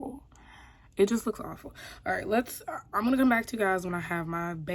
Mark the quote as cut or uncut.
uncut